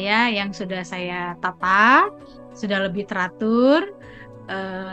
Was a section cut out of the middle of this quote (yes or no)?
no